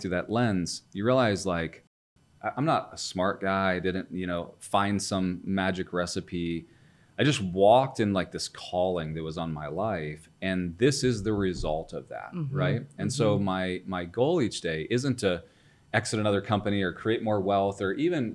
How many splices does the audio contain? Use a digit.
1